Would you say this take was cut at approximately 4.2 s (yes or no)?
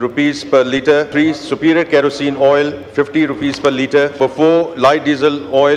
yes